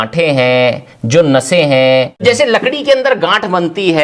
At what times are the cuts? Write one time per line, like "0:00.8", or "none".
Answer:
0:02.2